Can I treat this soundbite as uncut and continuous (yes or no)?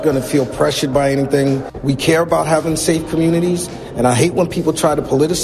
no